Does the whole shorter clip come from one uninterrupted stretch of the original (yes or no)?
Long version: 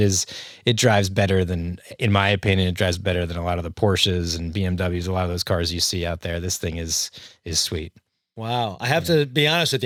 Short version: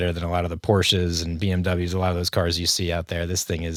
yes